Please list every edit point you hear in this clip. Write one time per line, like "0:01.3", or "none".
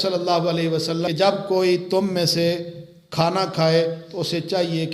0:01.1